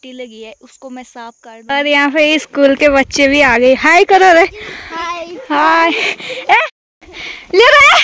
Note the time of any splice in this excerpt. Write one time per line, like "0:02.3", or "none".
0:01.5
0:06.6